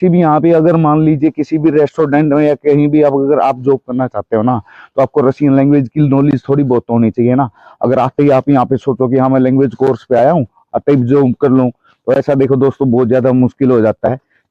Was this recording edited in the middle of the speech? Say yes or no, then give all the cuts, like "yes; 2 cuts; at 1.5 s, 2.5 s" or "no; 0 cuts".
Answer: no; 0 cuts